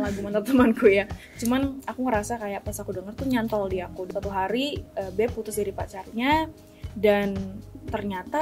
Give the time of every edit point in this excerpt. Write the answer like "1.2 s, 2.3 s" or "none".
4.1 s